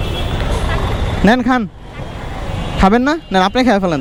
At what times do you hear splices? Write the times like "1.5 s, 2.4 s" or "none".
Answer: none